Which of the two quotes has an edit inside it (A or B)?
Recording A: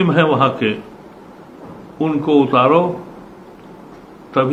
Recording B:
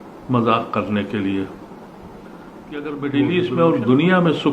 B